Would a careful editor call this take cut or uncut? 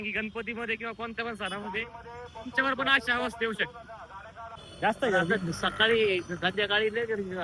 cut